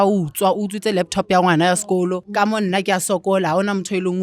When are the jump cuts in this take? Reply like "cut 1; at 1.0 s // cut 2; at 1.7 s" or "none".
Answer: cut 1; at 2.2 s